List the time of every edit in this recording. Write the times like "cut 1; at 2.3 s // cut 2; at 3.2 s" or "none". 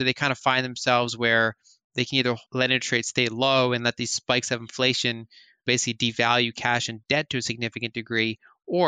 cut 1; at 2.4 s // cut 2; at 5.6 s // cut 3; at 7.0 s